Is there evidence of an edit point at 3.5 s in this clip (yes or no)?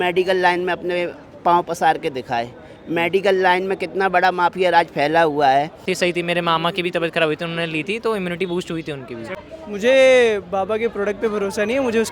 no